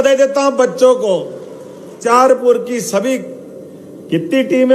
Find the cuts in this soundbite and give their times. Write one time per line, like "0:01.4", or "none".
0:02.1